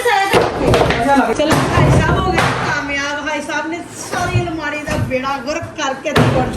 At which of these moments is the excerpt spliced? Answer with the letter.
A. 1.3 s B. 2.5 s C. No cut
A